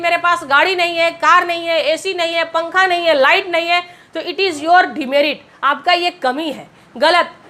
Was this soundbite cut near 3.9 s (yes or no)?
no